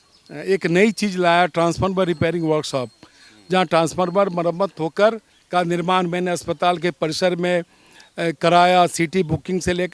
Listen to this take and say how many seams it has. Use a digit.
1